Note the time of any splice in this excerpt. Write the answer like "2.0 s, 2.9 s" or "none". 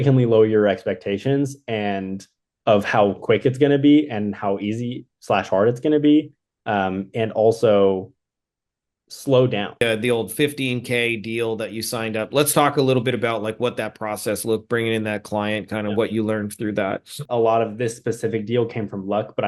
9.8 s, 17.2 s